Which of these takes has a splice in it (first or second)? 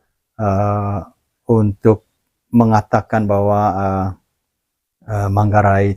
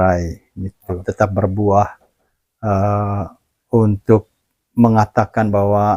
second